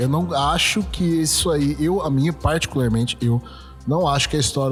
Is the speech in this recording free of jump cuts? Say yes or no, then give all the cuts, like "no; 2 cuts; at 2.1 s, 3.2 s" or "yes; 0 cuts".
yes; 0 cuts